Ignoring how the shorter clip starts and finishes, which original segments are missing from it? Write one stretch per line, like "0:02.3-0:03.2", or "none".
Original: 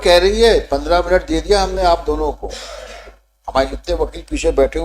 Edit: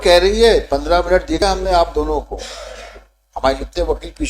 0:01.4-0:01.5